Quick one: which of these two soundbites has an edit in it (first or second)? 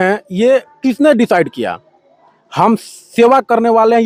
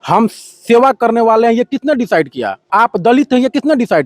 second